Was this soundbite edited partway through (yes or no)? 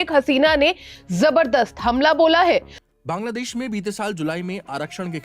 yes